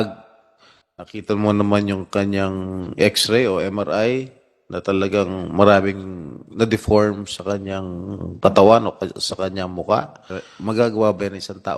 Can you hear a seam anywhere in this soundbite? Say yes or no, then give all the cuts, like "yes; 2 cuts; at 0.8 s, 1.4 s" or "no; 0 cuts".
yes; 1 cut; at 10.5 s